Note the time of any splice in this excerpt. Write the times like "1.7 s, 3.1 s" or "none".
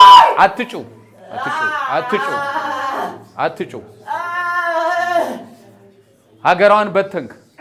none